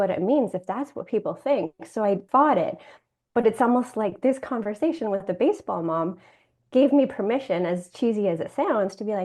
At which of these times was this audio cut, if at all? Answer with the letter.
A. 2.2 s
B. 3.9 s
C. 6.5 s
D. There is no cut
A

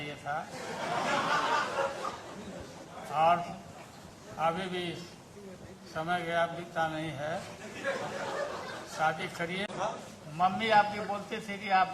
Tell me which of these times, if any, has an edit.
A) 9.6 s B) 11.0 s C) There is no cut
A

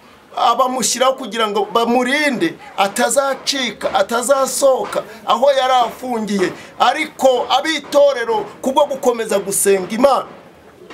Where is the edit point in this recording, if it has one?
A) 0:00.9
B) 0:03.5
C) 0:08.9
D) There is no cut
D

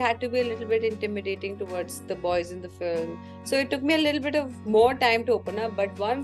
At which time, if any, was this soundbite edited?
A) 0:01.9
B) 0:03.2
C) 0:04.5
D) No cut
D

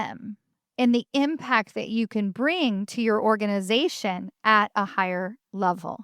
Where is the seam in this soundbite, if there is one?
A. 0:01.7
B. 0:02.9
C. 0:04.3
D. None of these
D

